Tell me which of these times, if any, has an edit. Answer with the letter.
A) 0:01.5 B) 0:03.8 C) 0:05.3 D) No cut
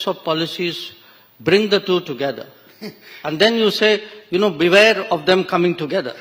D